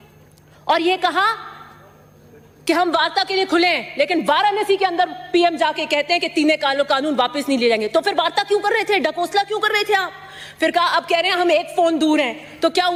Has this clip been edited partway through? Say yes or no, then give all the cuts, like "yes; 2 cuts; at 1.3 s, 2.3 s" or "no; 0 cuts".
no; 0 cuts